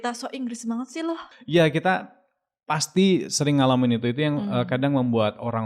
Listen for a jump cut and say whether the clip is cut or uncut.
cut